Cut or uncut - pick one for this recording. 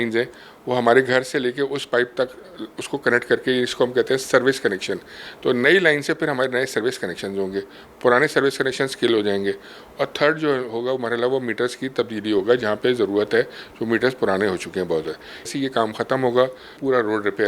cut